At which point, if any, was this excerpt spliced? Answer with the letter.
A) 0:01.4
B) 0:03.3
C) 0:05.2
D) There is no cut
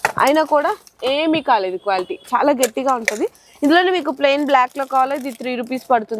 D